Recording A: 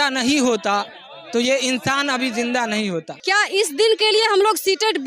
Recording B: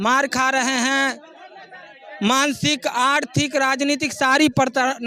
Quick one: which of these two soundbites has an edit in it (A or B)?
A